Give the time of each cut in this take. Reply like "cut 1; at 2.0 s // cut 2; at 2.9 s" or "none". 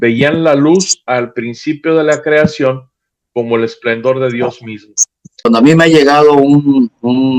cut 1; at 5.5 s